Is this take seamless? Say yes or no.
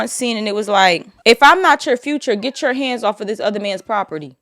no